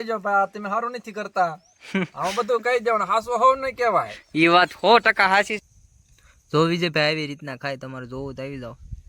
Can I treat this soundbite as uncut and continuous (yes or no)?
no